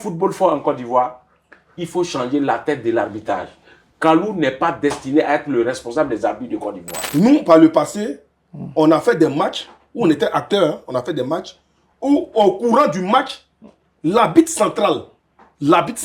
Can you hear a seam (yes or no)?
yes